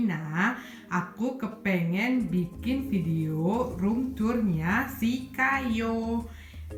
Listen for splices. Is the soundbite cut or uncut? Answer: uncut